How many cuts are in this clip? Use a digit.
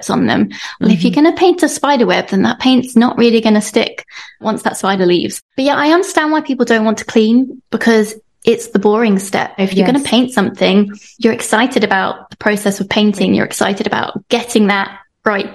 2